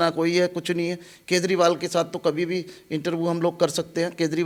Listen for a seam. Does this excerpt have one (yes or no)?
no